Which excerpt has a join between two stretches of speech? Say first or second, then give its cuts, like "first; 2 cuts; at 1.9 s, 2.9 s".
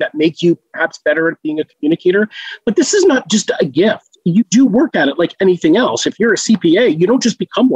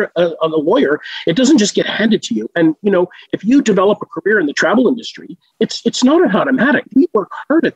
second; 2 cuts; at 4.5 s, 6.8 s